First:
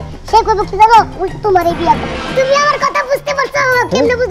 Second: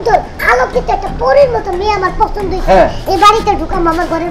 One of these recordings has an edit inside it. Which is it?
first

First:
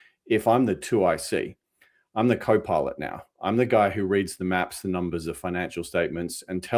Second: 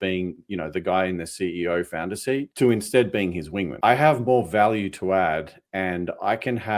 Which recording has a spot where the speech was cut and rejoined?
second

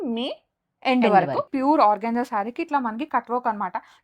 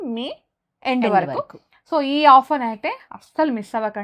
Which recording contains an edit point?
first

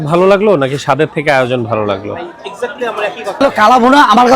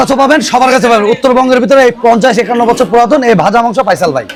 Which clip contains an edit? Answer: first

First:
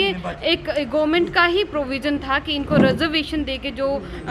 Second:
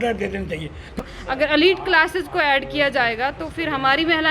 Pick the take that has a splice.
second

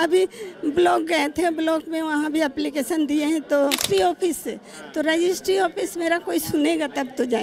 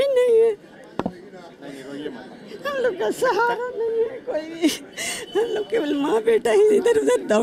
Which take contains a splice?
first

